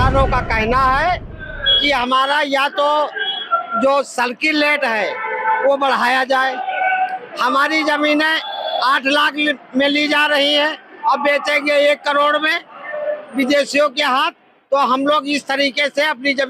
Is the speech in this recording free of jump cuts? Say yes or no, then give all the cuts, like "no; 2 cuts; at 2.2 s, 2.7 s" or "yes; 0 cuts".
yes; 0 cuts